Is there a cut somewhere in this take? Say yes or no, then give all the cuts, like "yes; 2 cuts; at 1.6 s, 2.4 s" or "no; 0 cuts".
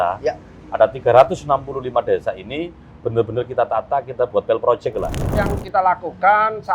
yes; 1 cut; at 5.4 s